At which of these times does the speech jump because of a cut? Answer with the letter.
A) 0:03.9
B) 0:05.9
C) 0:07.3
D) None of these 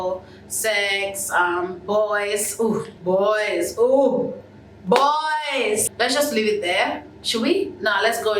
B